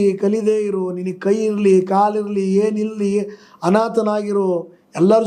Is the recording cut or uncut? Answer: uncut